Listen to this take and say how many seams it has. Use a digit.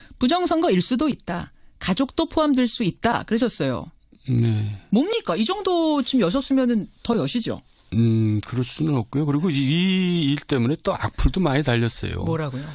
1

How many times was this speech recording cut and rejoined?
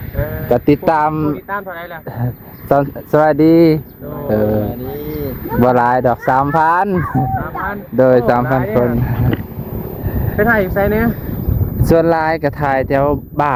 0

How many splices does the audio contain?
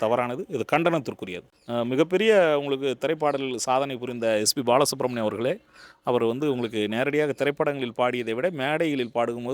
1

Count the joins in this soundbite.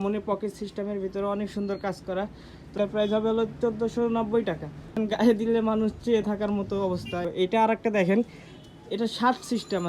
3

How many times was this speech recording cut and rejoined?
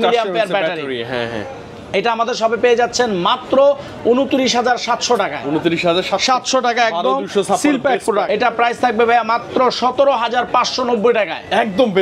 1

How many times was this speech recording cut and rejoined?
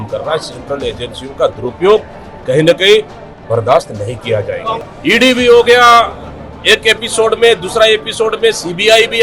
1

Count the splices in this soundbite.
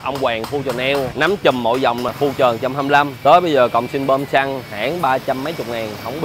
3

